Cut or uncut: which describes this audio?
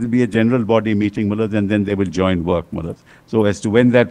uncut